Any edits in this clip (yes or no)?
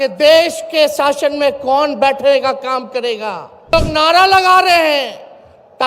yes